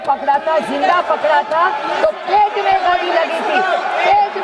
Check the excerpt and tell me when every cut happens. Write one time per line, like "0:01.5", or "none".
none